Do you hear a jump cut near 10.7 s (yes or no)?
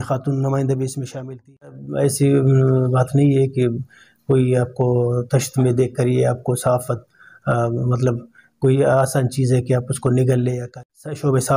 yes